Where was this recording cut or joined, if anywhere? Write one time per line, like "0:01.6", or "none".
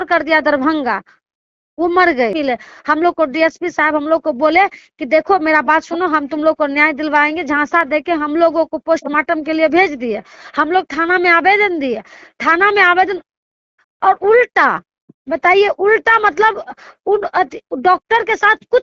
0:02.3